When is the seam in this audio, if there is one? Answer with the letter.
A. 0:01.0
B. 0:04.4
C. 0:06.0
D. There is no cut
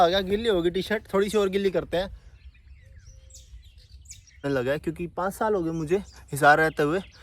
B